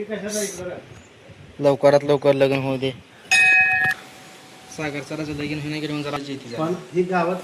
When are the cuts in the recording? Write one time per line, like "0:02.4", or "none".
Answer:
0:03.9
0:06.2